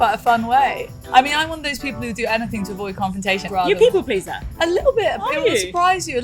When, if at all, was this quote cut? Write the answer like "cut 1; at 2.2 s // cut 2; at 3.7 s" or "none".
cut 1; at 1.0 s // cut 2; at 3.5 s